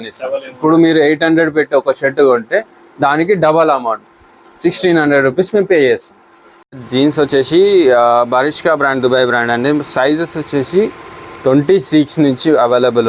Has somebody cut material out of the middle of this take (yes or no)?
yes